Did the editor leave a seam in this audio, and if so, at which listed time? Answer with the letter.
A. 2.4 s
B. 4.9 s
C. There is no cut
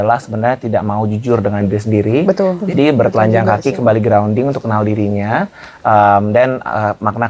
C